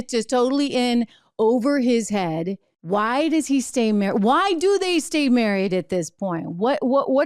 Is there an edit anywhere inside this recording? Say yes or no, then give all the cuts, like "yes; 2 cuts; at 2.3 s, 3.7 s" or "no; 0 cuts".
yes; 1 cut; at 2.7 s